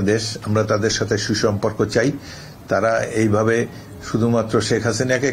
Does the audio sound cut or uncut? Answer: uncut